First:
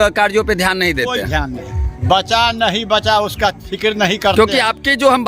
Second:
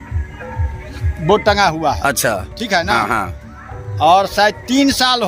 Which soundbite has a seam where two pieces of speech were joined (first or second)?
first